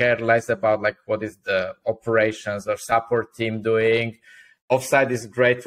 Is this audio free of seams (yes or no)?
no